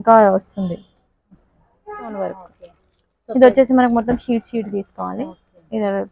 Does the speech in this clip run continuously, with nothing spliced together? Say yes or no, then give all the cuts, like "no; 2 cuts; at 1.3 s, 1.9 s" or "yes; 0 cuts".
no; 1 cut; at 2.1 s